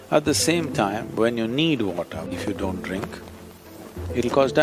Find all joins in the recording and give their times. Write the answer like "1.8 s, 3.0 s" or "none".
2.3 s